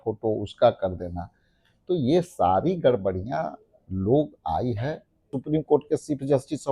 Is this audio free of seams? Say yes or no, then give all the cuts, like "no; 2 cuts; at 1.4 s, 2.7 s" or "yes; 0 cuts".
no; 1 cut; at 5.3 s